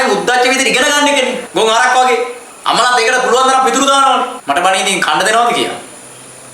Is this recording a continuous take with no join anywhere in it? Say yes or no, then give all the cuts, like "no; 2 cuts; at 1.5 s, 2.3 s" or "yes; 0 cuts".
no; 3 cuts; at 1.4 s, 2.4 s, 4.4 s